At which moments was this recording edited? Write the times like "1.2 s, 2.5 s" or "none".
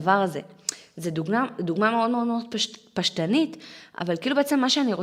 none